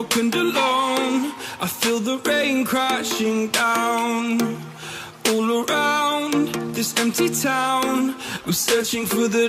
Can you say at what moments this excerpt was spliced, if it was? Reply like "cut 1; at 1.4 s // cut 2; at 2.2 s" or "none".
none